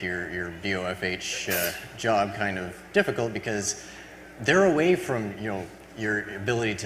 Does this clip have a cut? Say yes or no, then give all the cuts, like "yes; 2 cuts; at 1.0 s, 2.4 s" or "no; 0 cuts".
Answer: yes; 1 cut; at 5.3 s